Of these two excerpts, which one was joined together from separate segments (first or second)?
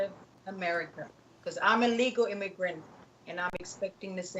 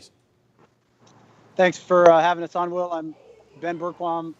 first